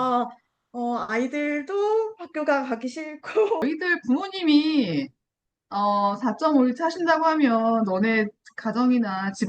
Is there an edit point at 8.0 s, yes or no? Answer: no